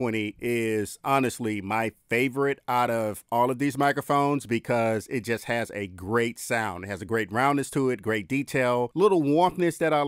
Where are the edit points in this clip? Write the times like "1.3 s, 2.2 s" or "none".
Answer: none